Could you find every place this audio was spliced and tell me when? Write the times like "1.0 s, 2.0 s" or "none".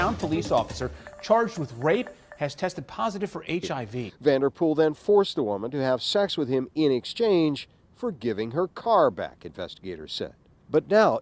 4.0 s